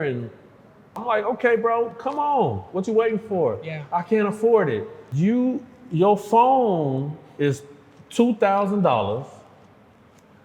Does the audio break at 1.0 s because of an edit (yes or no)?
yes